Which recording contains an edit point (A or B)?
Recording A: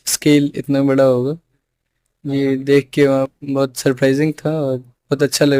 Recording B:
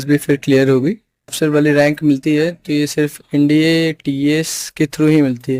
B